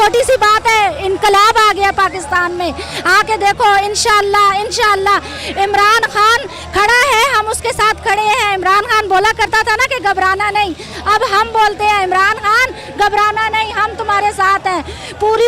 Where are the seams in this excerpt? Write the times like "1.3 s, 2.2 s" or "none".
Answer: none